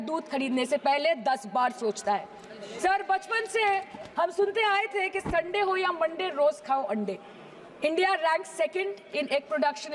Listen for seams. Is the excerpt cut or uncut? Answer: uncut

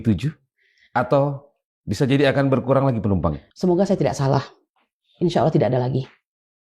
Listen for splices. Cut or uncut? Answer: cut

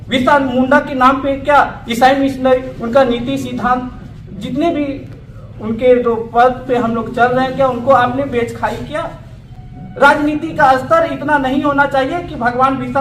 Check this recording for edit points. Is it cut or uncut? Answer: uncut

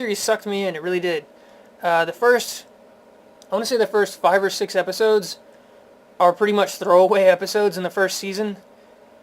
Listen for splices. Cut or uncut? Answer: cut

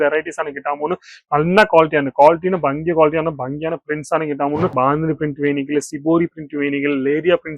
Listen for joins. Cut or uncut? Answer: cut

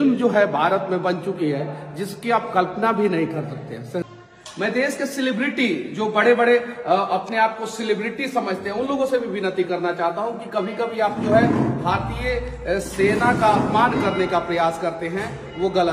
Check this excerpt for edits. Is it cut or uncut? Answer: cut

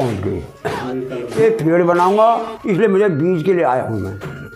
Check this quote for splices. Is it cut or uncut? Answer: cut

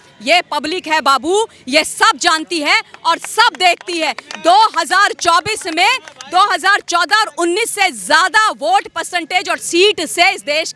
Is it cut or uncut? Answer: uncut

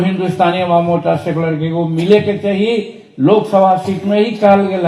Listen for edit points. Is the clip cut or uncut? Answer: uncut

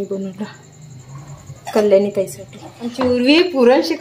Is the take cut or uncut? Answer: cut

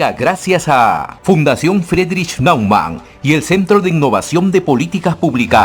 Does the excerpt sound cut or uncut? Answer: cut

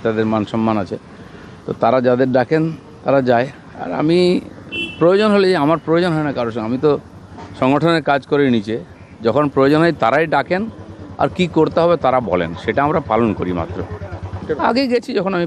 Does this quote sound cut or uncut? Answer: uncut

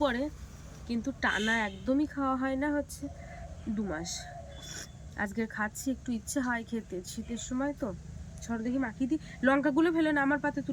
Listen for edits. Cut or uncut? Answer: uncut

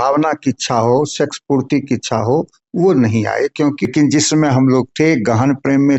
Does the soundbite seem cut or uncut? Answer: cut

